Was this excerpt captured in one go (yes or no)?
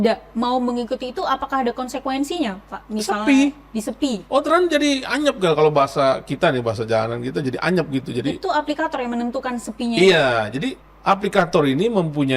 no